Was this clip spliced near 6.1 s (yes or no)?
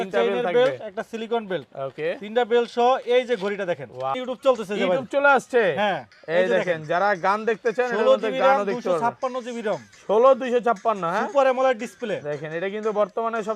no